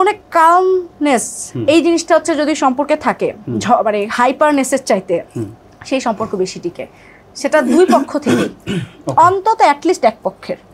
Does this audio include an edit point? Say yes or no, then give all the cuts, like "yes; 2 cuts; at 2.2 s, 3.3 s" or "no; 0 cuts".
no; 0 cuts